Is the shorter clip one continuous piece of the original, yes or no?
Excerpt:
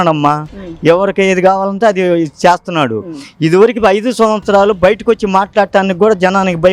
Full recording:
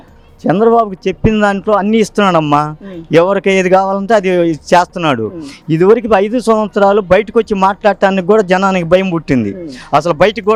yes